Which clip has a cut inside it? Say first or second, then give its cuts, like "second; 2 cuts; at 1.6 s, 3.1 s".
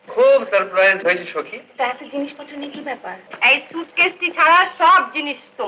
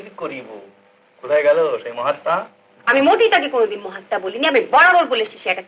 first; 1 cut; at 3.3 s